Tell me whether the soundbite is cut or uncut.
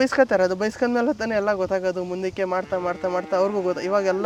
uncut